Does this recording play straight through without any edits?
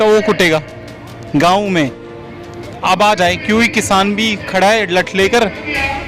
yes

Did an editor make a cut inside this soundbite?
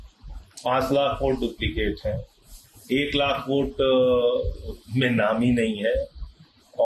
no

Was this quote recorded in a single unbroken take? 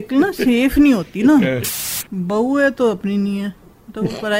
no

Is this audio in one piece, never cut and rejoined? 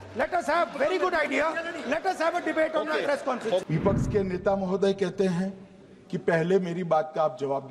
no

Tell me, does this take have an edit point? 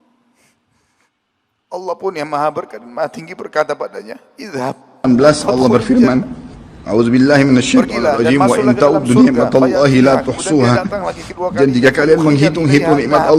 yes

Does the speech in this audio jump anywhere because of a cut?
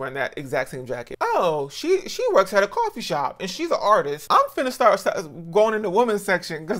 yes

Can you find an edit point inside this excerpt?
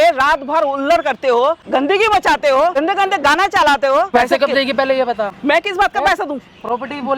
yes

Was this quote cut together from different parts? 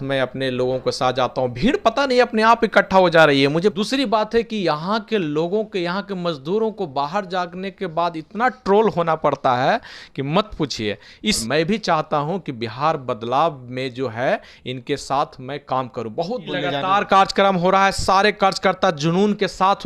yes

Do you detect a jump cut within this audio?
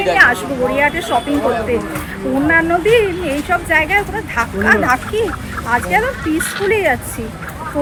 no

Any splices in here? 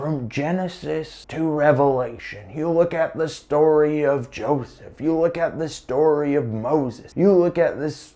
yes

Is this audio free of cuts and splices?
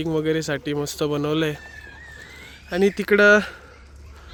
yes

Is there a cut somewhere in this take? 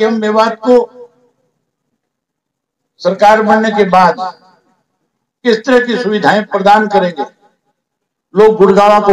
no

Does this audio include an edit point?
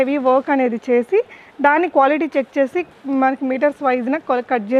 no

